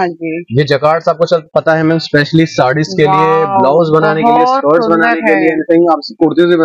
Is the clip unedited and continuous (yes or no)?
yes